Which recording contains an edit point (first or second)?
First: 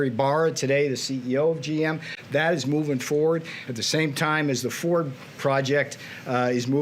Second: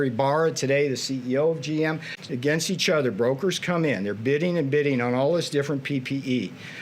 second